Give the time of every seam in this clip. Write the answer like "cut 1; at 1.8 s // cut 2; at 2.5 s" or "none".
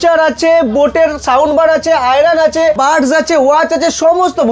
cut 1; at 2.8 s